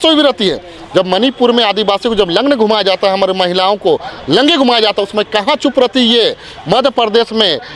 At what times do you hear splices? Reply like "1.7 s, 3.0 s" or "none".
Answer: none